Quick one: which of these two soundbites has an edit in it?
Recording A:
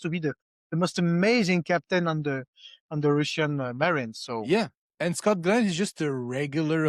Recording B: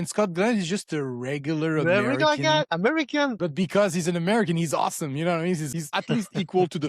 B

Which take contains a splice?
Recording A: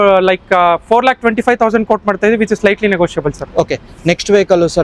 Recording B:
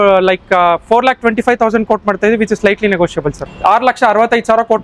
B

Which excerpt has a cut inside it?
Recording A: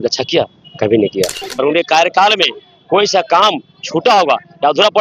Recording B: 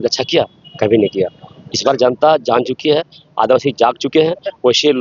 A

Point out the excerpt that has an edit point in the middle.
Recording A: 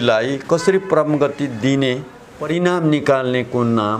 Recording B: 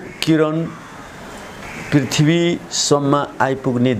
A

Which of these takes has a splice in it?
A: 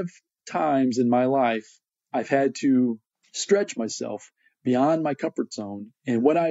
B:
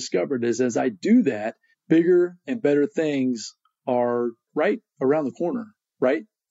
B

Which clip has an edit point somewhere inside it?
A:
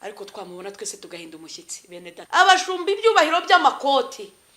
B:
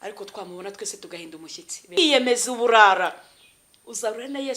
A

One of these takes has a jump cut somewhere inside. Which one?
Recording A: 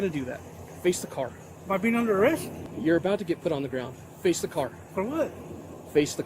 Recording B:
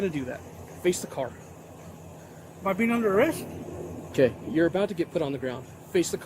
A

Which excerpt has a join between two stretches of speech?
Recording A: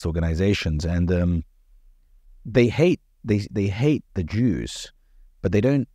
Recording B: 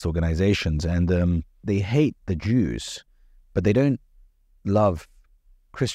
B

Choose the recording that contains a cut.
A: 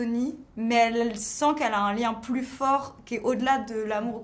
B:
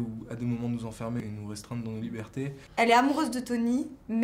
B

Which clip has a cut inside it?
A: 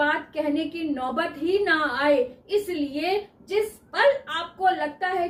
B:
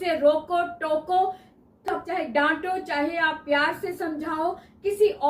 B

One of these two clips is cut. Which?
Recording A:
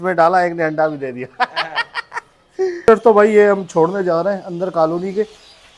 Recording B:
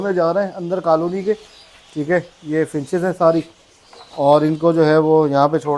A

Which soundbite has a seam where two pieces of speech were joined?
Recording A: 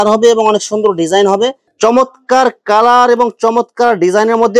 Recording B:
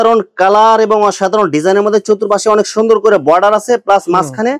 A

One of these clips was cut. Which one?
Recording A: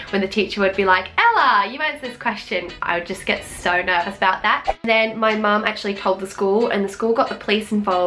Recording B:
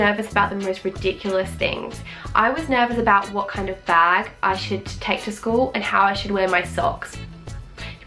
A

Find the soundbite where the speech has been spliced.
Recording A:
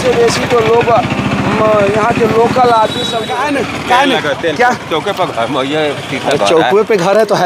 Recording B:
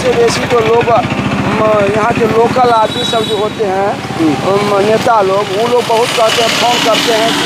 A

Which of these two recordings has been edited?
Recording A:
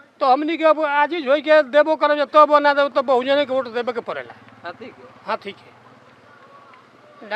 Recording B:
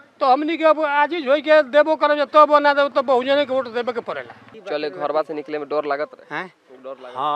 B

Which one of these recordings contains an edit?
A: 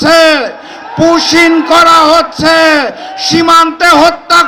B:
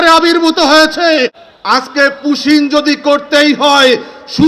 B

